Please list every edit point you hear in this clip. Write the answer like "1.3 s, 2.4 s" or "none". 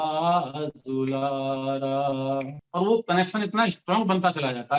2.6 s